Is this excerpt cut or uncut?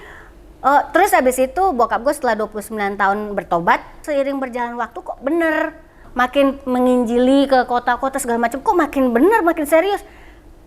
cut